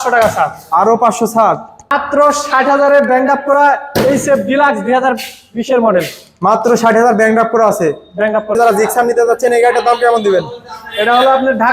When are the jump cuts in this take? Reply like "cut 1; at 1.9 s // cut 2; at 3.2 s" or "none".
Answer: cut 1; at 1.9 s // cut 2; at 8.6 s